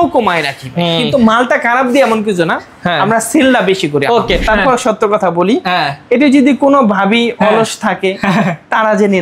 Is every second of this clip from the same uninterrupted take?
no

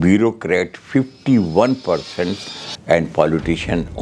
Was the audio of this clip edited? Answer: no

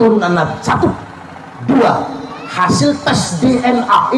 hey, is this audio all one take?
yes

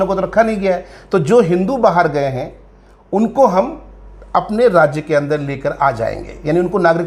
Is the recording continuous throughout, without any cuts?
yes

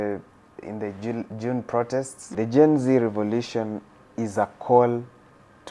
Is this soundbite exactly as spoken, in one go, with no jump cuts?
no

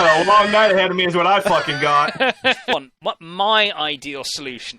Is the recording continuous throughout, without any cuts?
no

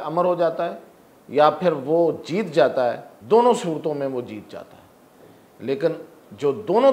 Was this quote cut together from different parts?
yes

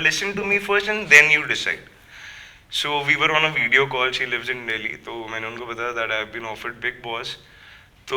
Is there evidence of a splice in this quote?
no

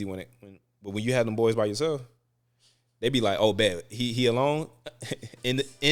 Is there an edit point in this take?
no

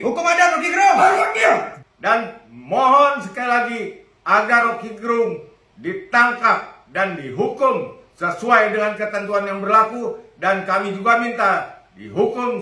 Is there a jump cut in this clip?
yes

